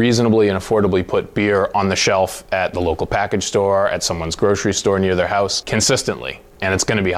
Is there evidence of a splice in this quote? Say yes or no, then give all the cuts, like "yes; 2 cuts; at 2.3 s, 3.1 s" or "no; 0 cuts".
no; 0 cuts